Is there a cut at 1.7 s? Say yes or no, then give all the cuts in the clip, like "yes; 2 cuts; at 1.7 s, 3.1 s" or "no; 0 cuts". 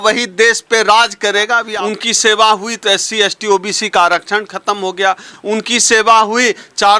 yes; 2 cuts; at 1.7 s, 5.3 s